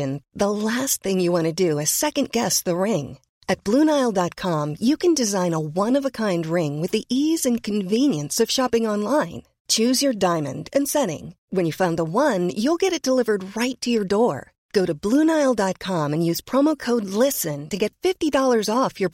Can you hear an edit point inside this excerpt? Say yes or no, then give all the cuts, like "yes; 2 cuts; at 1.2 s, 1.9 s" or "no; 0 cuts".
no; 0 cuts